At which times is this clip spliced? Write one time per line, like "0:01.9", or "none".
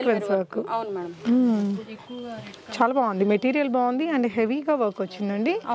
none

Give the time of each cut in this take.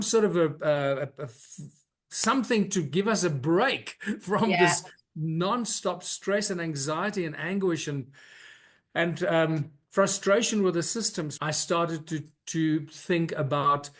0:11.3

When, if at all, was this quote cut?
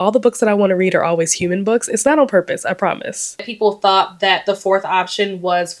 0:03.4

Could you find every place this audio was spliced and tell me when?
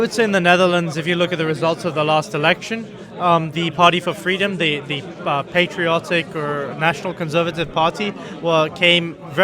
none

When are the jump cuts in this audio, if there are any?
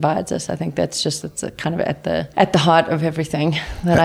none

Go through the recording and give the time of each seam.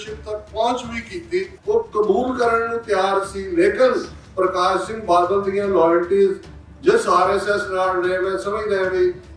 0:01.5

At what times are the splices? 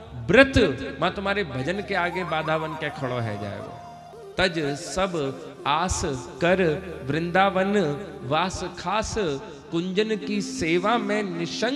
0:04.1

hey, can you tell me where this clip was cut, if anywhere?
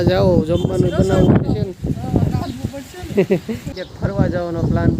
0:03.7

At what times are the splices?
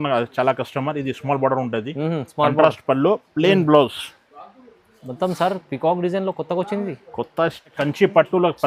0:07.8

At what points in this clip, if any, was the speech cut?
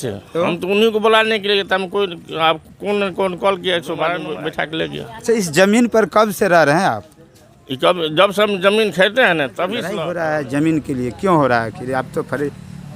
0:04.3
0:09.9

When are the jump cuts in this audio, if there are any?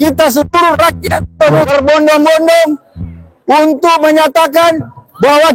0:01.7

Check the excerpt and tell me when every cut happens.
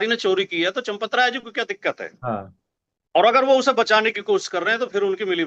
none

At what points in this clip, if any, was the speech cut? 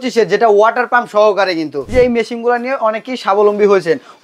0:01.8

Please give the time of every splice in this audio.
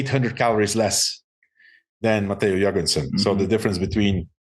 none

